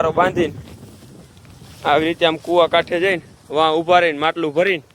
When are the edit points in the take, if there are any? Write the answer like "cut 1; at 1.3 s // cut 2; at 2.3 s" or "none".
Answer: none